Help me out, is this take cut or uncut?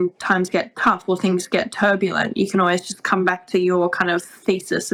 uncut